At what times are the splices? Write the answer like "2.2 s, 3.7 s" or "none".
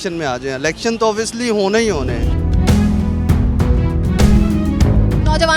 none